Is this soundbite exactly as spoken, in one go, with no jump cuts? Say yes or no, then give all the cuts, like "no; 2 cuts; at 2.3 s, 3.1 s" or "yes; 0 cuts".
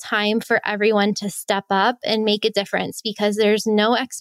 yes; 0 cuts